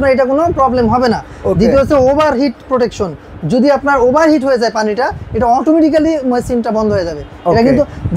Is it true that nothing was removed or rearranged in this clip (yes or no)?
yes